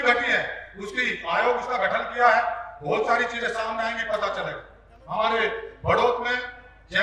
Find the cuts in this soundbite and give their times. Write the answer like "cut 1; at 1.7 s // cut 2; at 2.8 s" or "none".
none